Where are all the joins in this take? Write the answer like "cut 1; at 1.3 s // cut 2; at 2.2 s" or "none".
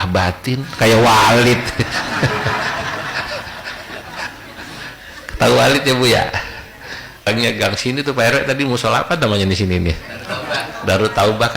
cut 1; at 7.3 s